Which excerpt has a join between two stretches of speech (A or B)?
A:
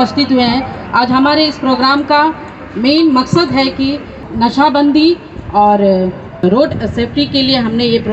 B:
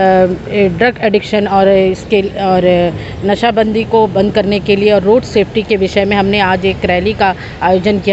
A